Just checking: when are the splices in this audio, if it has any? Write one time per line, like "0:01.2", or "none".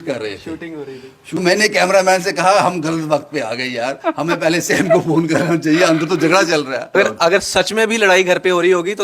0:01.4
0:07.0